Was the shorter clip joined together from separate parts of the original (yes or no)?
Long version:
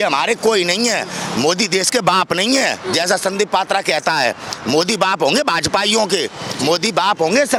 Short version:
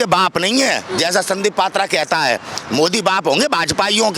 no